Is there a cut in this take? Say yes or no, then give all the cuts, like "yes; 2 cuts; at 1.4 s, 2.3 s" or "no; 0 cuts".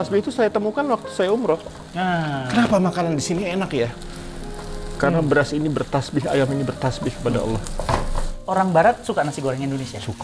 yes; 1 cut; at 8.4 s